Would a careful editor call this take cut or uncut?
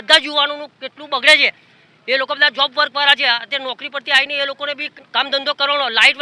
cut